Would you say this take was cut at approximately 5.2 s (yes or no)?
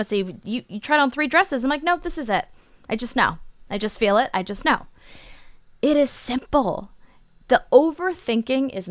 no